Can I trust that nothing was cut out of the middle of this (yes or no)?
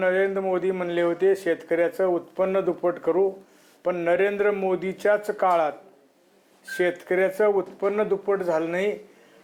yes